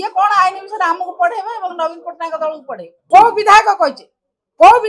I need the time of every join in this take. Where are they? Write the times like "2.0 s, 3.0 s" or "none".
2.9 s